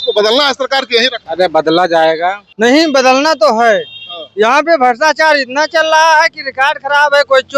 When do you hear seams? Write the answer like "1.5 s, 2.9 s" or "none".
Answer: 1.2 s, 2.4 s